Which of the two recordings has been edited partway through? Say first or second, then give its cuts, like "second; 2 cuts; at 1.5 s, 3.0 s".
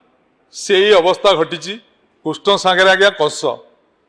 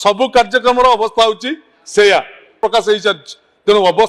second; 1 cut; at 2.6 s